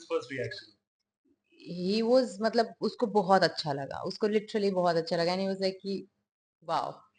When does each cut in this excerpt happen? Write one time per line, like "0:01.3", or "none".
none